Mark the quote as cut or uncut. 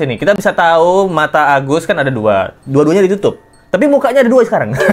uncut